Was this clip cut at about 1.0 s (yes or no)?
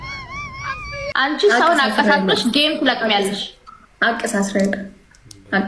yes